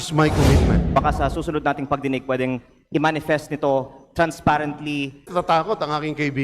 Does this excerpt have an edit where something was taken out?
yes; 2 cuts; at 1.0 s, 5.3 s

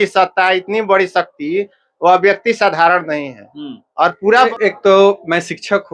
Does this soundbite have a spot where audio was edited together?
yes; 1 cut; at 4.5 s

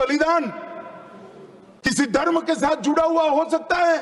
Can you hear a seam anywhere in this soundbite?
no; 0 cuts

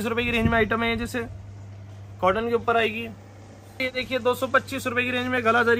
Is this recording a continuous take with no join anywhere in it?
no; 1 cut; at 3.9 s

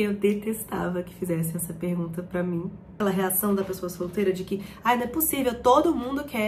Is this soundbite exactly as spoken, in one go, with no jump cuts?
no; 1 cut; at 3.0 s

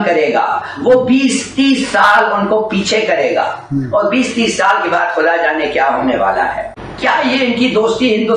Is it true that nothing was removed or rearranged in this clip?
no; 1 cut; at 6.7 s

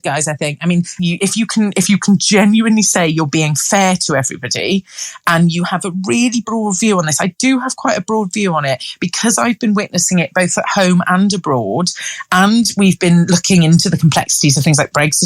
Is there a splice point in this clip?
yes; 1 cut; at 0.9 s

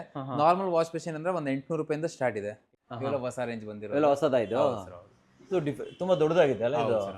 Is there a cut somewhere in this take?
yes; 1 cut; at 2.6 s

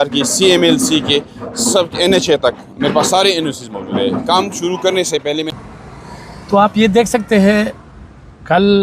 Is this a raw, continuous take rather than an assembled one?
no; 1 cut; at 5.6 s

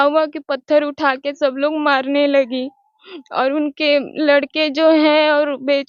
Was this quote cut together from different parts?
no; 0 cuts

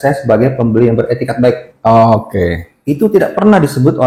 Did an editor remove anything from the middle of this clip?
no; 0 cuts

